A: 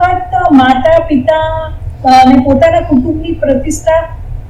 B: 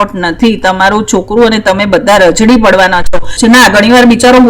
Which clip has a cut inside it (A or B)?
B